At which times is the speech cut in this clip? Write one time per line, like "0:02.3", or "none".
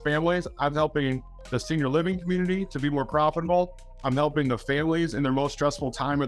none